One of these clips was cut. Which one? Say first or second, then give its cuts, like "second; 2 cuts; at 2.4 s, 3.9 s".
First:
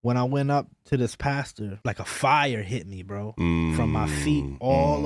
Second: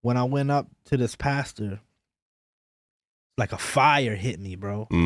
first; 1 cut; at 1.8 s